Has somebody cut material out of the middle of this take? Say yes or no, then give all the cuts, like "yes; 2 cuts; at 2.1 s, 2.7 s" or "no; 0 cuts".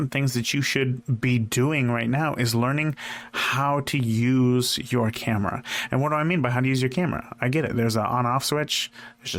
no; 0 cuts